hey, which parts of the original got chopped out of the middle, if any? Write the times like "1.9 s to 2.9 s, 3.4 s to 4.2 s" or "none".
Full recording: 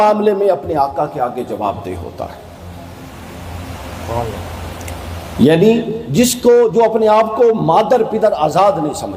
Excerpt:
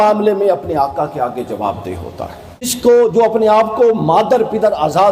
2.7 s to 6.3 s